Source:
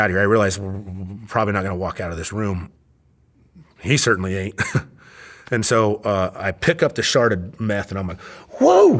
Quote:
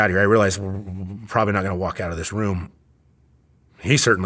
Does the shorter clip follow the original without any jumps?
yes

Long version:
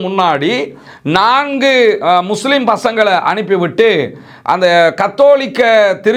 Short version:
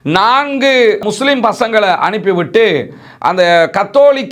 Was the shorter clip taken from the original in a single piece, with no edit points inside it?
no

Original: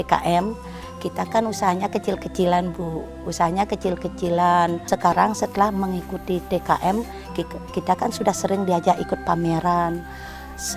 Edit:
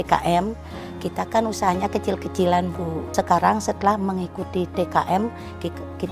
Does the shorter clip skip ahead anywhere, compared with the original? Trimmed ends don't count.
yes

